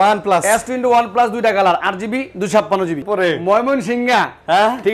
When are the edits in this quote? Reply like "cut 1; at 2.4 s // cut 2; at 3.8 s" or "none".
cut 1; at 3.0 s